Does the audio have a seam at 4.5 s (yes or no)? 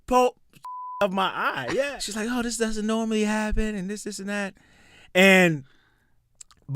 no